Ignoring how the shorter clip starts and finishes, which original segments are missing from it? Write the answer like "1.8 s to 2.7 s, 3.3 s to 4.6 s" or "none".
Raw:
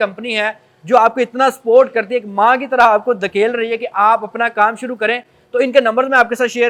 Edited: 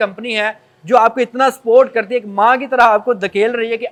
none